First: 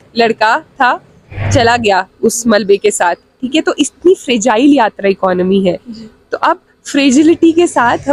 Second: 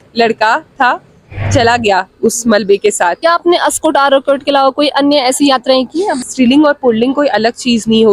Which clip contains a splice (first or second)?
second